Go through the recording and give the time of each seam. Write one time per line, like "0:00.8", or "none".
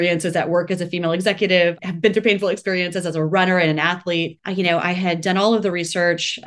0:01.8
0:04.4